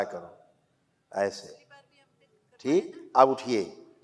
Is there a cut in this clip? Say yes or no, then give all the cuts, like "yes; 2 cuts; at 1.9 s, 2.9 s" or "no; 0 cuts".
no; 0 cuts